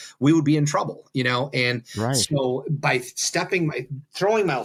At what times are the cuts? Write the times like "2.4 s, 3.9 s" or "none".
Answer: none